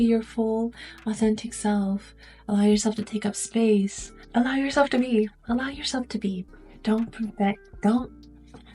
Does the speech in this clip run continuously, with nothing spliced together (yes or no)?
no